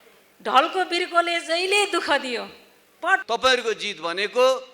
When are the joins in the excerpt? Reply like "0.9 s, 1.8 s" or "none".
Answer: 3.2 s